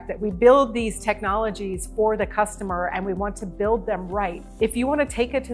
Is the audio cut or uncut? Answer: cut